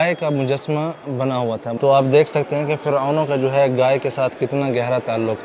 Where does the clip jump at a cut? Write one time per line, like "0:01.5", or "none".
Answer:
0:01.4